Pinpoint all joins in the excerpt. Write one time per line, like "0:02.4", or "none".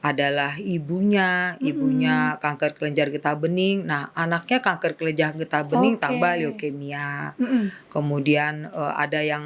none